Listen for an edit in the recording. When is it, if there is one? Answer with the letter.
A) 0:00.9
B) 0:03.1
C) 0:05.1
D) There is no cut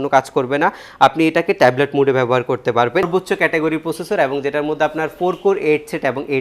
B